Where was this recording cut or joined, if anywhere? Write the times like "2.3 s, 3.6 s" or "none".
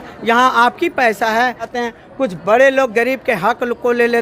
1.7 s